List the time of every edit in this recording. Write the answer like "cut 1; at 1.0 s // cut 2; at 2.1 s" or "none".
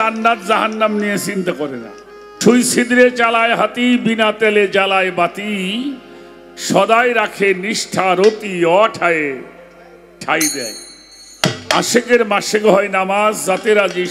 cut 1; at 2.4 s